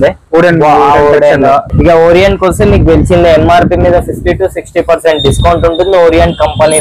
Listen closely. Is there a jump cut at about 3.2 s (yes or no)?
no